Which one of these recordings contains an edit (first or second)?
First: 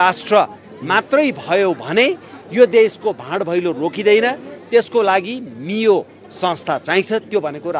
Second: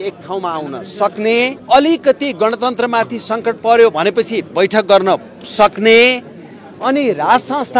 second